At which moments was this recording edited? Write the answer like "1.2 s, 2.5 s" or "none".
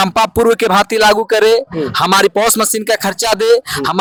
none